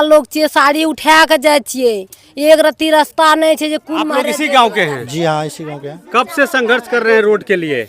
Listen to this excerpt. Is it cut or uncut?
cut